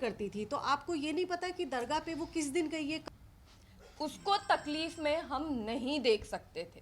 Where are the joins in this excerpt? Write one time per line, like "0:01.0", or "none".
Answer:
0:03.0